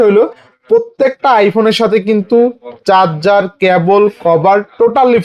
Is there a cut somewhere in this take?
no; 0 cuts

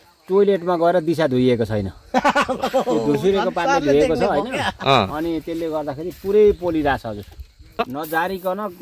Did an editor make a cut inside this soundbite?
yes; 1 cut; at 7.8 s

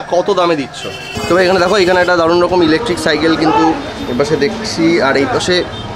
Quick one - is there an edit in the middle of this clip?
yes; 1 cut; at 1.2 s

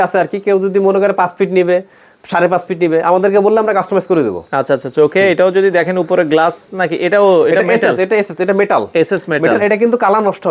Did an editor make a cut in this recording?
no; 0 cuts

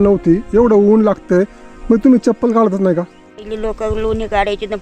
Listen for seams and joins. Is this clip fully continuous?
no; 1 cut; at 3.4 s

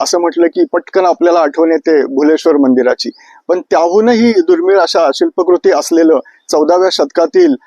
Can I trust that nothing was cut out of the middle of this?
yes; 0 cuts

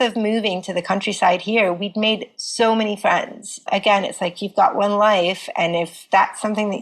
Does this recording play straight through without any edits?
no; 2 cuts; at 3.7 s, 6.0 s

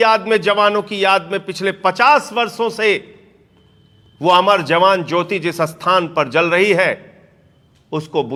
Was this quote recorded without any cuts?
yes; 0 cuts

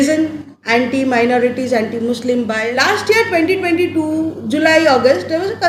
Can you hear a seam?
yes; 1 cut; at 2.6 s

